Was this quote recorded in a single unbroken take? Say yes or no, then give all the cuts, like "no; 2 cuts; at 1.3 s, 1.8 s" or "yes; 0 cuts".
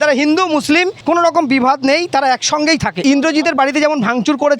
no; 1 cut; at 3.0 s